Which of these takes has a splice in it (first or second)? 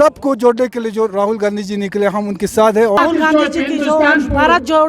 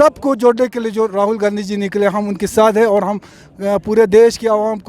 first